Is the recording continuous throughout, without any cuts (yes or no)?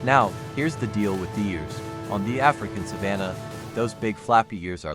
yes